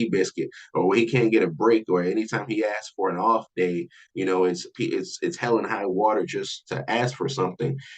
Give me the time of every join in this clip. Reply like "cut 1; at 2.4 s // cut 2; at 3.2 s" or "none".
cut 1; at 6.6 s